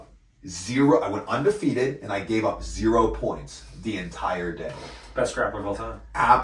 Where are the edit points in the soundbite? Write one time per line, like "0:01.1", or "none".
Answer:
none